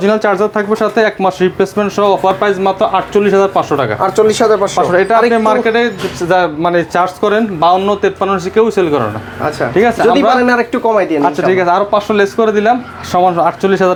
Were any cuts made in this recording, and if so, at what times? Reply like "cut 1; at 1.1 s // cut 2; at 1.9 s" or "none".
none